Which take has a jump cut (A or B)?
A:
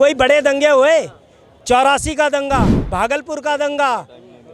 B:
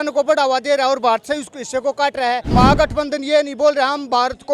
B